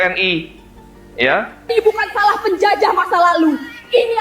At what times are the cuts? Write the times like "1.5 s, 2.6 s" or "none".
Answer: 1.7 s